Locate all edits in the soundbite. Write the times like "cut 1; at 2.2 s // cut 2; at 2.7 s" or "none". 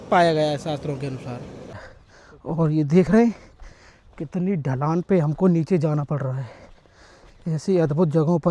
cut 1; at 1.8 s